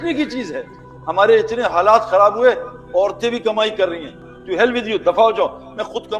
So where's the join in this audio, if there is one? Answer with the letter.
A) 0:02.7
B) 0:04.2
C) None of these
B